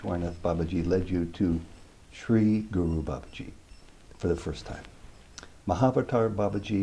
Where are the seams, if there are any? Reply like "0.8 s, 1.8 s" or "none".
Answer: none

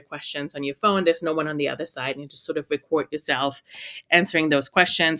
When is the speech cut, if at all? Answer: none

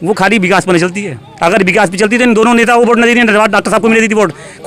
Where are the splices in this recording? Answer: none

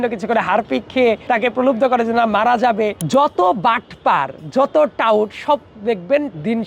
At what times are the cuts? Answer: 1.2 s, 3.0 s

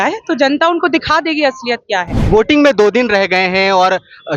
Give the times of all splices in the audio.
2.2 s

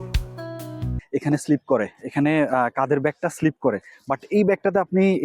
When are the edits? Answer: 1.0 s

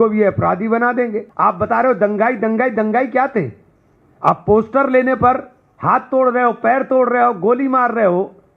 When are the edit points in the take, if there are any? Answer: 1.3 s

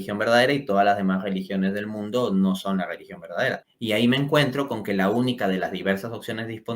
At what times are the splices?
3.7 s

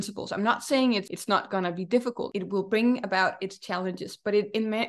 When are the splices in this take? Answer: 1.1 s, 2.3 s

